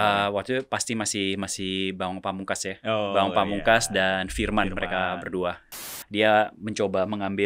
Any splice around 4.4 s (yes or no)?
no